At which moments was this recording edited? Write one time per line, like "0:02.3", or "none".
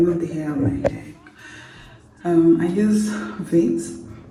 none